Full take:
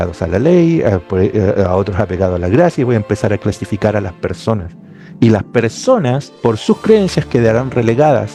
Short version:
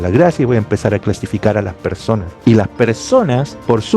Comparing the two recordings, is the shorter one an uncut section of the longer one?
no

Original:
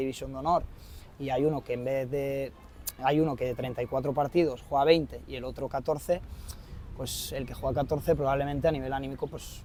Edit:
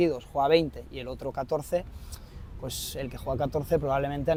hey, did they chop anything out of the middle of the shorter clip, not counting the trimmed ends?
no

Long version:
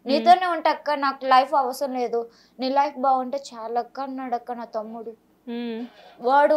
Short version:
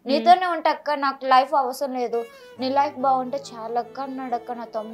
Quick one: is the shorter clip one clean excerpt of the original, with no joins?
yes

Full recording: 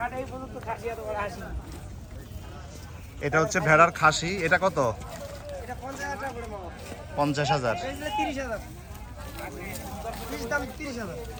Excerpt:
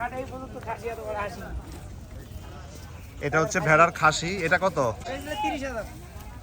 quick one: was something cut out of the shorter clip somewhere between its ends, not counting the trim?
yes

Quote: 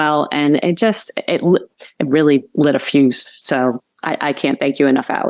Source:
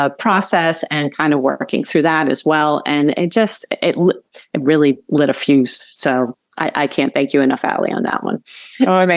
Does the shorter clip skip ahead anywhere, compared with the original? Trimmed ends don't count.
no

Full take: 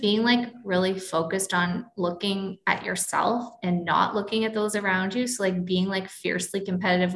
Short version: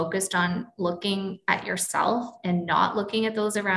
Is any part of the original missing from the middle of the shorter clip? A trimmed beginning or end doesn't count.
no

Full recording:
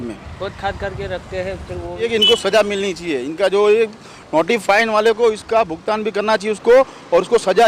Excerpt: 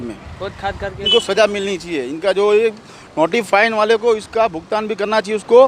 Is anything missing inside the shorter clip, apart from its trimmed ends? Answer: yes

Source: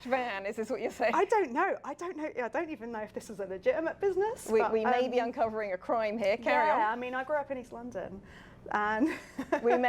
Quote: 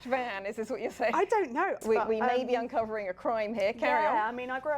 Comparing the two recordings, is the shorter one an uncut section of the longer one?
no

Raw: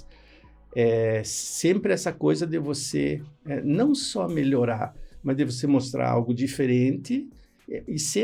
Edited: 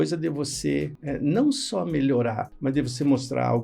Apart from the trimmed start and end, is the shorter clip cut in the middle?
yes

